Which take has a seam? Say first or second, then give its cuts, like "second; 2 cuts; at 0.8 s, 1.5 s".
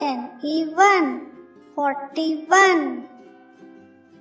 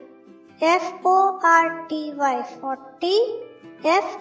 first; 1 cut; at 3.1 s